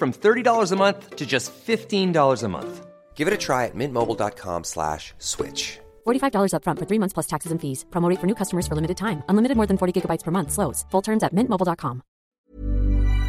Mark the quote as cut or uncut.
cut